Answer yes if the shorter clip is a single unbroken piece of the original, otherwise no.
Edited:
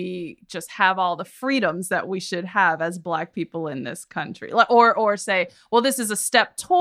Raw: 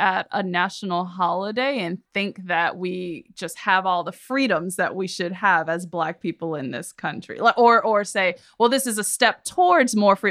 yes